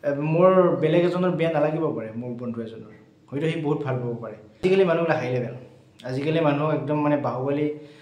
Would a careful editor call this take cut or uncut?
cut